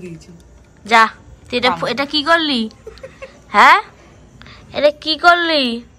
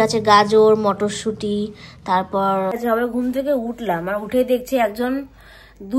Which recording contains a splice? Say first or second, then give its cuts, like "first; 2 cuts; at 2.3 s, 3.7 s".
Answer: second; 1 cut; at 2.7 s